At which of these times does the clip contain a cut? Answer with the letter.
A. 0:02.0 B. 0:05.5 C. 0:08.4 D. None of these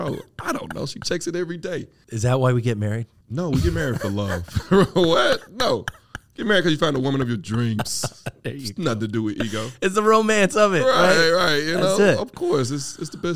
A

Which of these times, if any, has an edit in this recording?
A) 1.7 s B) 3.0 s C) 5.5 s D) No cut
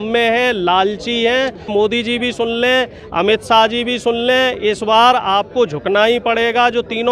A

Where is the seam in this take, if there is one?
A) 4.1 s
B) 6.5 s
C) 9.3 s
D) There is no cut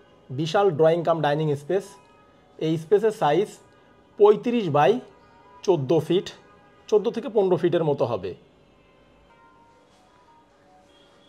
C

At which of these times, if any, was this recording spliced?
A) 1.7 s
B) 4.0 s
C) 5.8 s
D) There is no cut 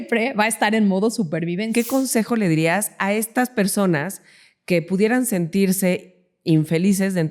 A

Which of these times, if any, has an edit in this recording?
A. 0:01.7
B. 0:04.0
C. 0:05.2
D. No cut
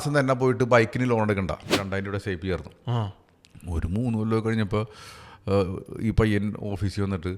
A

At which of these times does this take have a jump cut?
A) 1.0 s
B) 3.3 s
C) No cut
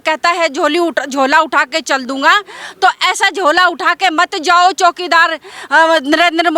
C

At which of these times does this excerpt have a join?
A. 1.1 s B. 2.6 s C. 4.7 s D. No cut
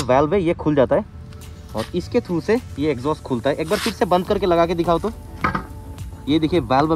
D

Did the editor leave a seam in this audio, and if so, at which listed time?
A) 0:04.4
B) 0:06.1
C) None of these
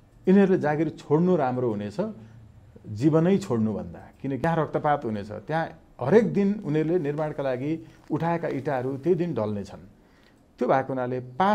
A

